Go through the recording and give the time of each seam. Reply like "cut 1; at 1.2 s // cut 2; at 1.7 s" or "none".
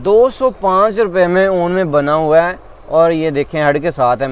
none